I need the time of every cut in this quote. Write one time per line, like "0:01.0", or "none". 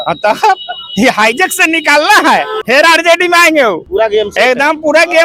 0:02.6
0:03.8